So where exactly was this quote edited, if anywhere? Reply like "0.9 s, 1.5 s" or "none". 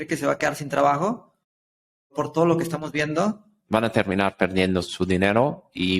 3.5 s, 4.9 s